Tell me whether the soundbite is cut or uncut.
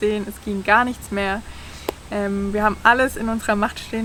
uncut